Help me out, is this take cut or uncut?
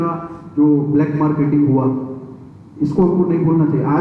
uncut